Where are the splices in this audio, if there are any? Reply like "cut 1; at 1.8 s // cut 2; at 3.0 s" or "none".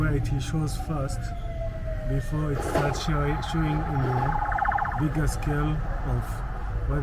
none

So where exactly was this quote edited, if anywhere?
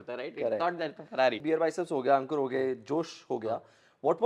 cut 1; at 1.4 s

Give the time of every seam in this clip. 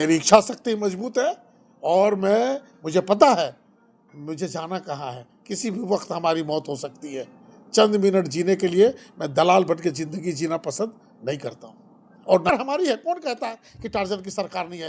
cut 1; at 12.5 s

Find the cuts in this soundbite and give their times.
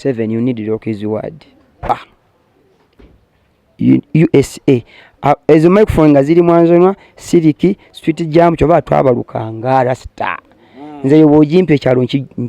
cut 1; at 1.9 s

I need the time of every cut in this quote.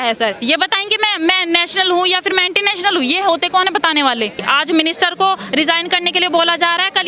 cut 1; at 4.4 s

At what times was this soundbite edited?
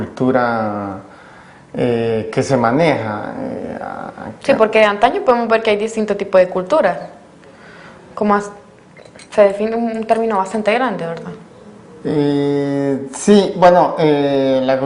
cut 1; at 8.3 s

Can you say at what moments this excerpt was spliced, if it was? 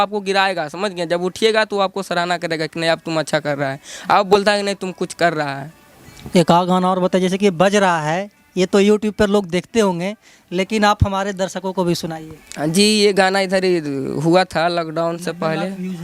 none

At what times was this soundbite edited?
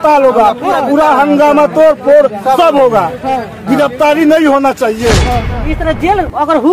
cut 1; at 5.7 s

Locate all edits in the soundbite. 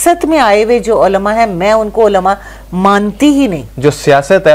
cut 1; at 3.7 s

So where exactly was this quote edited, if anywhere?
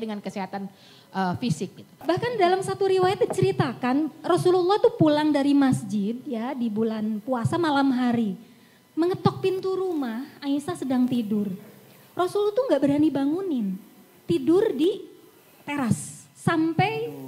cut 1; at 2.0 s

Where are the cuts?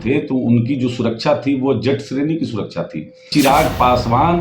cut 1; at 3.3 s

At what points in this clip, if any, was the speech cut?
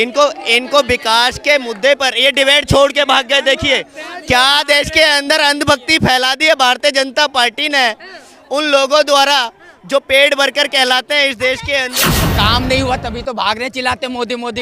cut 1; at 12.0 s

